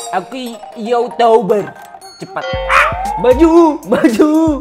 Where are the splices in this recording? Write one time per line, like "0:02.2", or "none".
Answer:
none